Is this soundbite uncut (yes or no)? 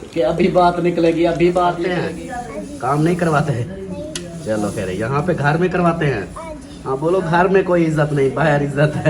no